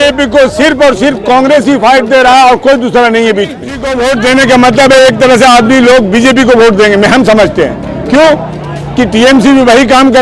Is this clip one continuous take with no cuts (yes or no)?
no